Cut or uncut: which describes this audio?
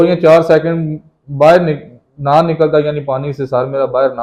uncut